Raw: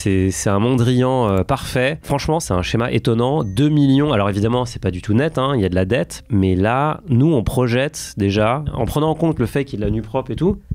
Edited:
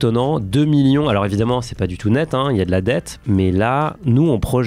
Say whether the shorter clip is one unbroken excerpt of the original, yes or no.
yes